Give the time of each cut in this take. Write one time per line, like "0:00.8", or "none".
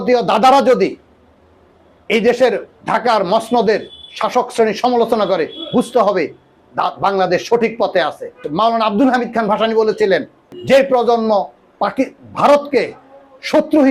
0:08.4
0:10.5